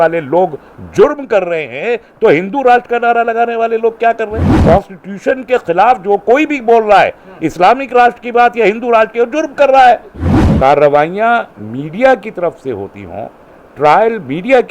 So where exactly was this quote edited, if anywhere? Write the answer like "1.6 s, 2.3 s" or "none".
4.5 s, 10.2 s